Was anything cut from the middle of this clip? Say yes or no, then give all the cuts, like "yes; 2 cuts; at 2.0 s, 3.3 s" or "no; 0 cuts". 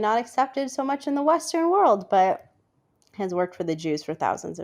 no; 0 cuts